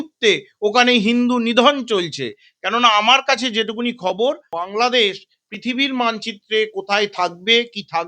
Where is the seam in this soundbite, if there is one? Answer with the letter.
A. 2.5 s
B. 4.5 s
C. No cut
B